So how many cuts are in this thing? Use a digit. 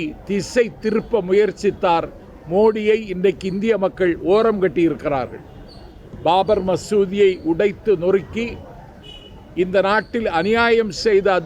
0